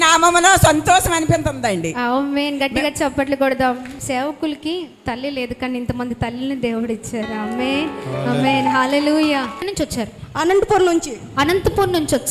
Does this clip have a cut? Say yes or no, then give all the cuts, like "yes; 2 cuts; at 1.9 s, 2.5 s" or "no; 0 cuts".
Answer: yes; 2 cuts; at 3.9 s, 9.6 s